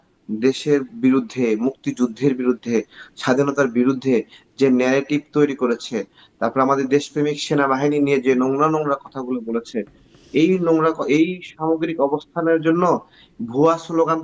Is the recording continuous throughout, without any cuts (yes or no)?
yes